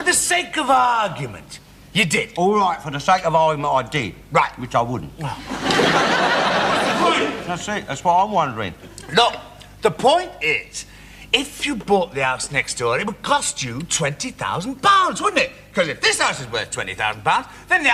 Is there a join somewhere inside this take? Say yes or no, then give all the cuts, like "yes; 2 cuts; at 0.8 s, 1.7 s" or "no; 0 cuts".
no; 0 cuts